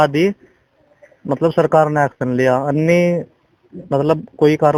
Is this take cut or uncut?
uncut